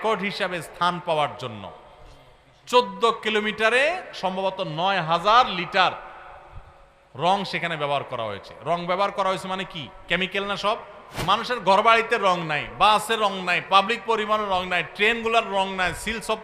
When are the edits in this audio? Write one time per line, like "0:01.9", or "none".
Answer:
0:11.1